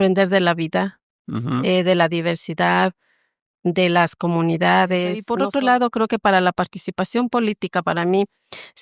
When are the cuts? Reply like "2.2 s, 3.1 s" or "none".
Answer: 5.2 s